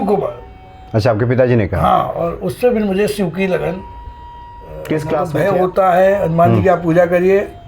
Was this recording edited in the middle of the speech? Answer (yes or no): yes